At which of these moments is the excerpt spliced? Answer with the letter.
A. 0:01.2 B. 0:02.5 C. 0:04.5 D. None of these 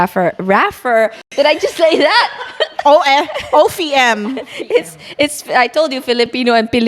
A